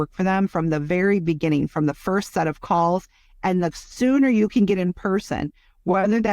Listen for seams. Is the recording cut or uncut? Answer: uncut